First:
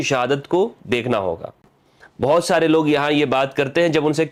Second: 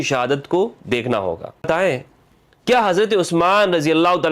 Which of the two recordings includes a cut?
second; 1 cut; at 1.6 s

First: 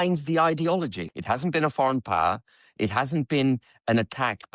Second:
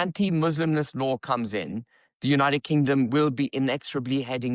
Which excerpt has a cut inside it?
first; 1 cut; at 1.1 s

